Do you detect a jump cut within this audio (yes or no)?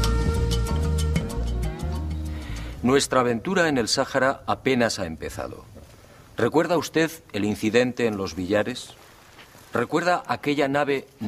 no